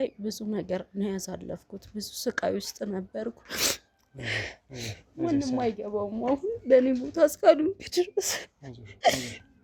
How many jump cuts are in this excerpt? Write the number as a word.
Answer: zero